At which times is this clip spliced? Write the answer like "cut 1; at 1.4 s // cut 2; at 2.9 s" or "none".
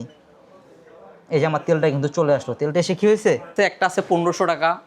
cut 1; at 3.5 s